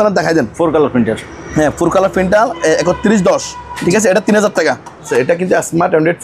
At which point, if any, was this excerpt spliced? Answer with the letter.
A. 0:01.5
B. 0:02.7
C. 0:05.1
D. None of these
C